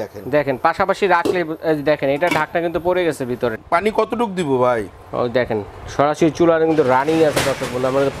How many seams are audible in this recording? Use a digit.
1